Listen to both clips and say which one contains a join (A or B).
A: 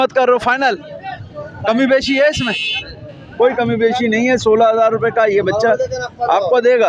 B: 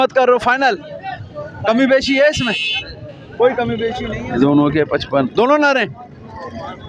B